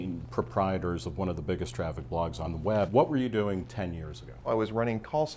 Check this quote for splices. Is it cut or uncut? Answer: cut